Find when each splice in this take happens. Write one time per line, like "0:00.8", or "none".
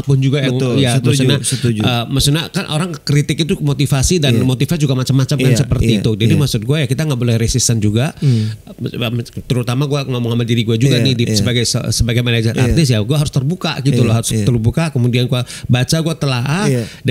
none